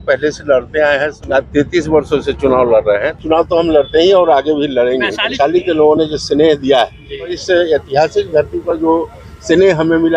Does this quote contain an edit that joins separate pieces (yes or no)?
yes